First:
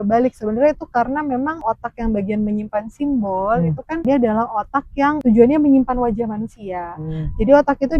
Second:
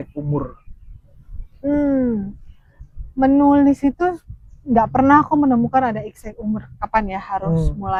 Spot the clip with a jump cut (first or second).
first